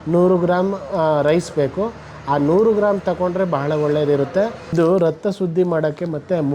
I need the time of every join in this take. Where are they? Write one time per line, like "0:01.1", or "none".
0:04.7